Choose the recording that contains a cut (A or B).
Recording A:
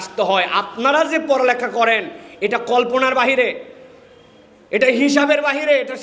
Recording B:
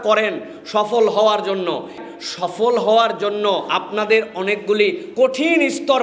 B